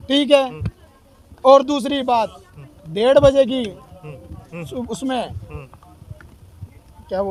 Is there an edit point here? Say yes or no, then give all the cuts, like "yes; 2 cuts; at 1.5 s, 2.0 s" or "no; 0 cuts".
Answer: no; 0 cuts